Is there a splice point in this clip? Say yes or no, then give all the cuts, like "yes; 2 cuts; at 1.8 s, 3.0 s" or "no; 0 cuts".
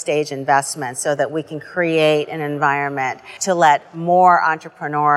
yes; 1 cut; at 3.4 s